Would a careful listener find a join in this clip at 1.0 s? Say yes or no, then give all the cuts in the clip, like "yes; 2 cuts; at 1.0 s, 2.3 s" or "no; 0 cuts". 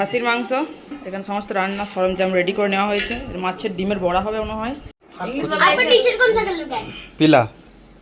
yes; 2 cuts; at 1.0 s, 5.1 s